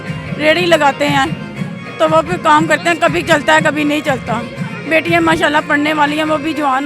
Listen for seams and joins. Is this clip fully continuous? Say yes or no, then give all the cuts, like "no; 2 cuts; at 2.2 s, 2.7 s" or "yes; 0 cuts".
yes; 0 cuts